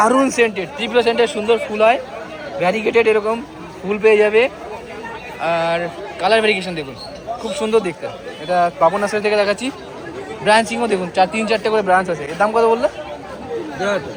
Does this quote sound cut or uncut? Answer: uncut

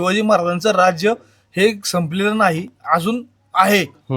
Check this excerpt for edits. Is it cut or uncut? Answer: uncut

